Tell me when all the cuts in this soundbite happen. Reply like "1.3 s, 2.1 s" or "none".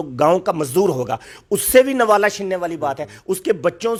none